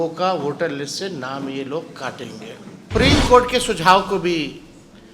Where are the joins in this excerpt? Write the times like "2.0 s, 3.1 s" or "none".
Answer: 2.9 s